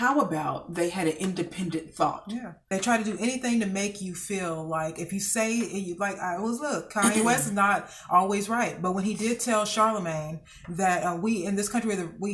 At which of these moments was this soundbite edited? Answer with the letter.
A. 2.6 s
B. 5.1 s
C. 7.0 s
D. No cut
A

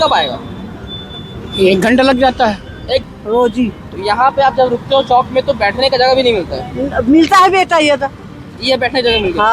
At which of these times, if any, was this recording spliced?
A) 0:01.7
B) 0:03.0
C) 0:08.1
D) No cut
B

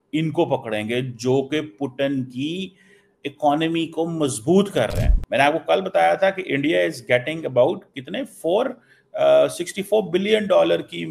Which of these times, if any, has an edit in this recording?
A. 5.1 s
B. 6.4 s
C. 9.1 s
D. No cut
A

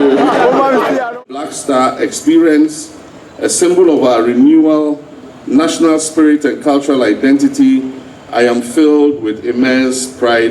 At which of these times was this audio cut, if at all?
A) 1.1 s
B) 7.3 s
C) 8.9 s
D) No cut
A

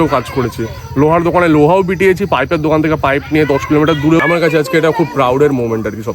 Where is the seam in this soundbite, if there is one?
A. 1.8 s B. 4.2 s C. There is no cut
B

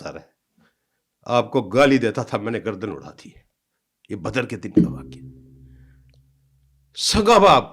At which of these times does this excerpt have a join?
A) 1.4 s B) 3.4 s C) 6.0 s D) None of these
D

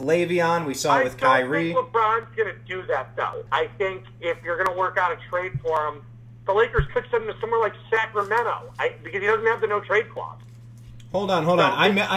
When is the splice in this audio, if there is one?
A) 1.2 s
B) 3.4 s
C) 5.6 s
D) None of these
B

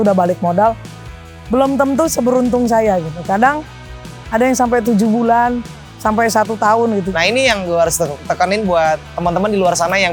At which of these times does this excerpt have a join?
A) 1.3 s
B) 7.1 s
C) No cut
B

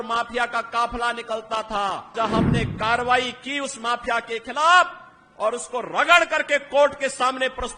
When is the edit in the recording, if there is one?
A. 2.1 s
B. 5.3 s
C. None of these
A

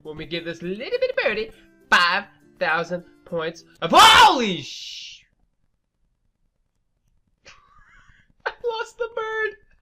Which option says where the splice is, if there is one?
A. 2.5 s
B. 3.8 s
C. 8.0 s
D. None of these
D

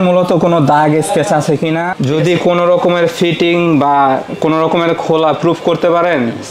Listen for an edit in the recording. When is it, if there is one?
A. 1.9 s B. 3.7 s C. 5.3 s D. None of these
A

